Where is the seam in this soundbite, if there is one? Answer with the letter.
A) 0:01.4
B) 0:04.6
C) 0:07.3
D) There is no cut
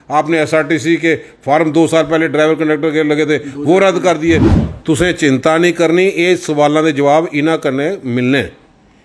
B